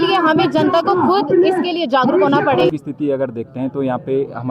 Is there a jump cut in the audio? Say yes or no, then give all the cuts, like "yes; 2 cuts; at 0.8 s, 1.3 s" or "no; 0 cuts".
yes; 1 cut; at 2.7 s